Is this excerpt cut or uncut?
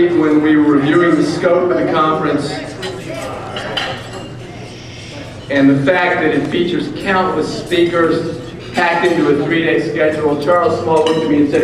uncut